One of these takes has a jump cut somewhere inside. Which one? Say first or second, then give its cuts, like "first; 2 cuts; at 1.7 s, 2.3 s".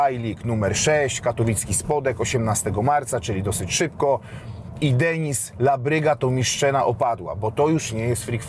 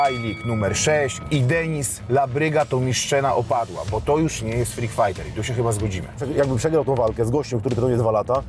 second; 2 cuts; at 1.2 s, 6.2 s